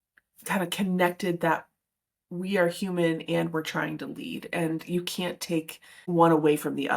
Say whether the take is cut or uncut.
cut